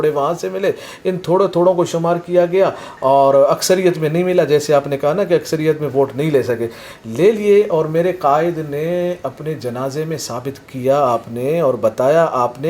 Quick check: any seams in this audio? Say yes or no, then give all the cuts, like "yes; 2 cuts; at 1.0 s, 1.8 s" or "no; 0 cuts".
no; 0 cuts